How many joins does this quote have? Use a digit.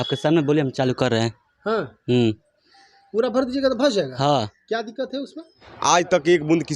1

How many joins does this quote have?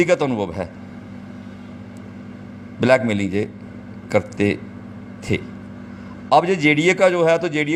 0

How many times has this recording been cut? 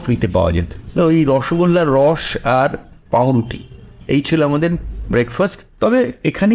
2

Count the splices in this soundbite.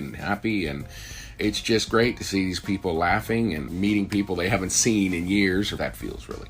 3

